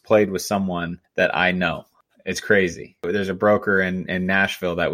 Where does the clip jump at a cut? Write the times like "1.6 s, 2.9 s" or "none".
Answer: 1.0 s, 3.1 s